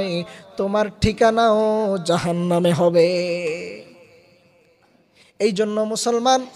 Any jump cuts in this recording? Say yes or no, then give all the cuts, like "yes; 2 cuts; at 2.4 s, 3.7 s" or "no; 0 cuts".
no; 0 cuts